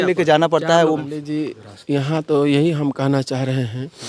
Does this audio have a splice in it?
yes; 1 cut; at 1.0 s

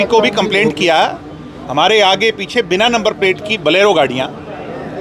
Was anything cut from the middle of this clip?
no; 0 cuts

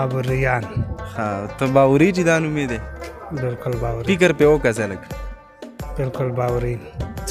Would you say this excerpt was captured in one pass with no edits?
yes; 0 cuts

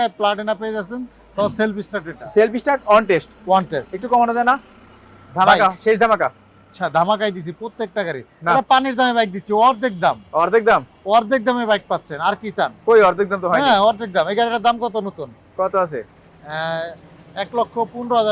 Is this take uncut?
yes; 0 cuts

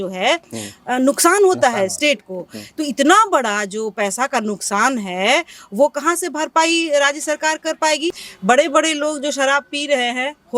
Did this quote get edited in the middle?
yes; 1 cut; at 8.2 s

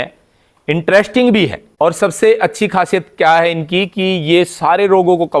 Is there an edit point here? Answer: yes; 1 cut; at 1.6 s

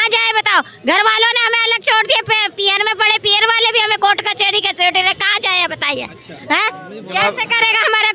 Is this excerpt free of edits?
yes; 0 cuts

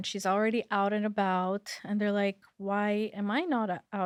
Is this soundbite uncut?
yes; 0 cuts

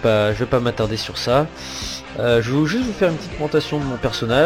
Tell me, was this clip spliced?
no; 0 cuts

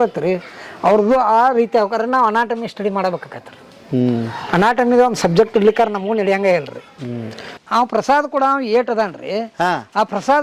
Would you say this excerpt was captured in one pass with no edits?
no; 1 cut; at 7.4 s

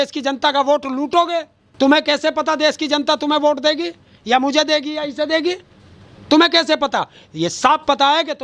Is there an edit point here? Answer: yes; 1 cut; at 1.6 s

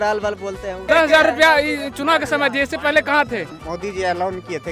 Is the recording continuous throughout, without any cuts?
no; 2 cuts; at 0.8 s, 3.6 s

